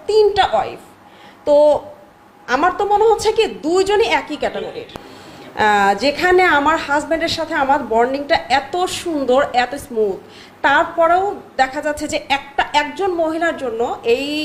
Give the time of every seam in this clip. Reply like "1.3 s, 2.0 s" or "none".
4.8 s